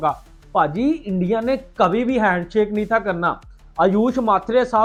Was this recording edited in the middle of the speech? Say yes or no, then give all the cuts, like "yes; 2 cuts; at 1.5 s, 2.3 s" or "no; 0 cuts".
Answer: no; 0 cuts